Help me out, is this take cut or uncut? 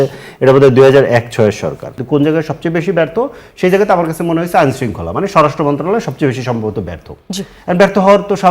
cut